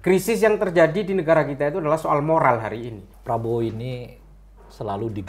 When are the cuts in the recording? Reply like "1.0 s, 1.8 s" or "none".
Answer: 3.1 s